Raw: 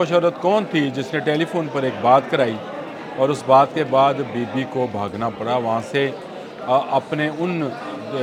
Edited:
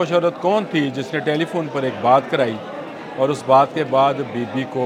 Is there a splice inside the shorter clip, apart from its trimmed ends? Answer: no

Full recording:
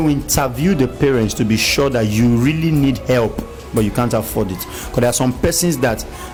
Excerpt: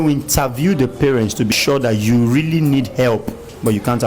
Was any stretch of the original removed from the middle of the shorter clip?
yes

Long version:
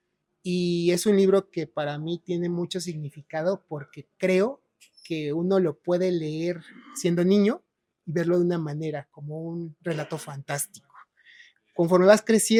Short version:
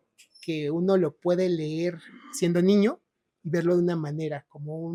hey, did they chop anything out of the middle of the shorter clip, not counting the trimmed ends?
no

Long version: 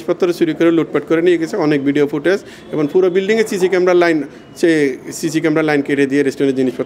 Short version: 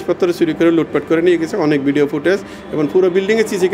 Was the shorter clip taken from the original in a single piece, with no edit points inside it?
yes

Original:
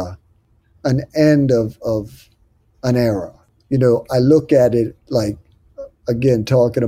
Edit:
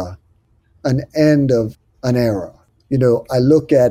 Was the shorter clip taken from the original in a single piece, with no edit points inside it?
no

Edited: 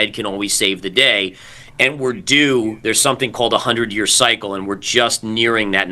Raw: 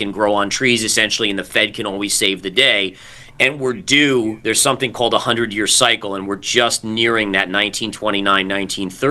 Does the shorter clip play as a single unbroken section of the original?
yes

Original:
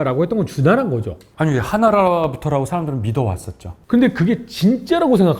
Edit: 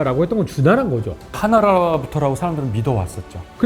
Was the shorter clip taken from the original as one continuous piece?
no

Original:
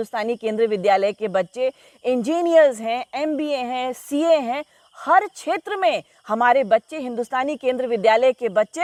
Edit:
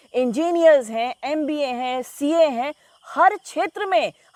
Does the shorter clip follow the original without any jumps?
yes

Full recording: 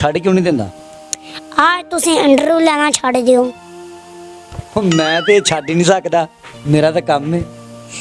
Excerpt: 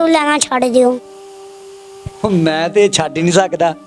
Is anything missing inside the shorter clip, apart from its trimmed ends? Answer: no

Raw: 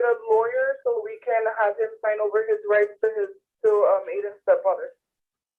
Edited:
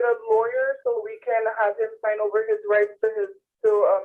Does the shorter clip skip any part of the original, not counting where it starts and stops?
no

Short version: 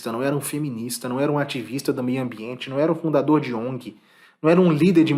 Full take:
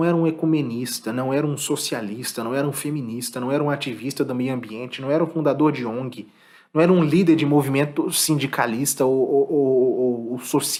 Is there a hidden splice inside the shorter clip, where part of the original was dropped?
no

